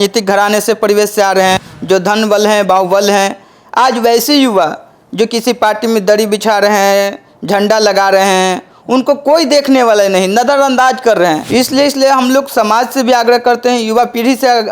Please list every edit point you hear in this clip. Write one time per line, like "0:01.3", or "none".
0:01.7
0:11.4